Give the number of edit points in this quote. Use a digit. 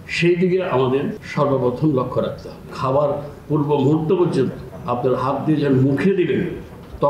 3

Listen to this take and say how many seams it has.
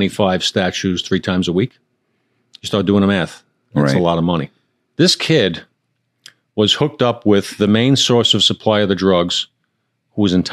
1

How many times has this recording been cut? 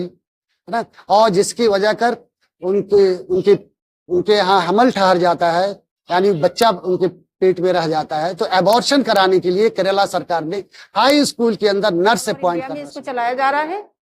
1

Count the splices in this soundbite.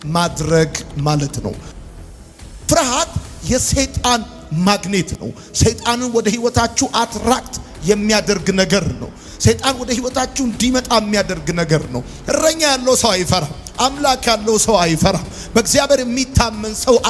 2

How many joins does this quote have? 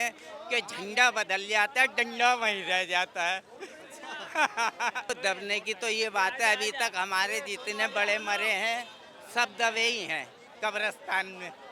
1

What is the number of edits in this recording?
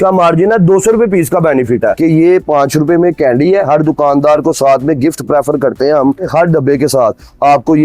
1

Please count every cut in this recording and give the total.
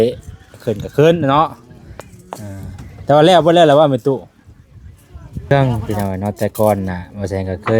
1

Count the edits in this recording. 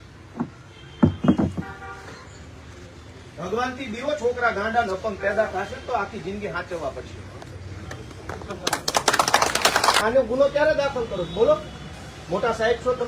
1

